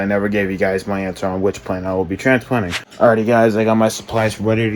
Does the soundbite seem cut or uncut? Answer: cut